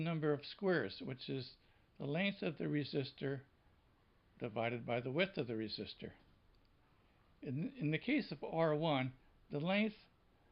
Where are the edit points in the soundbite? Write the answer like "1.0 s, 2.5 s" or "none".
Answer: 6.1 s